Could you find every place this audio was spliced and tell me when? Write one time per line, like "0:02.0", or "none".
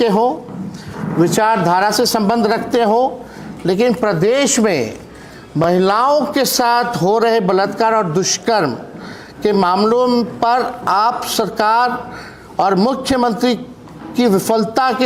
none